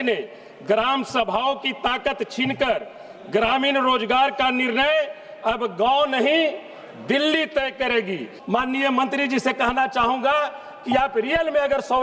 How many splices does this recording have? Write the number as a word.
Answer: one